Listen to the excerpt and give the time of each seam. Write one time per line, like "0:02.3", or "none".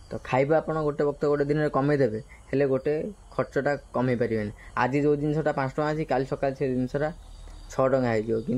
none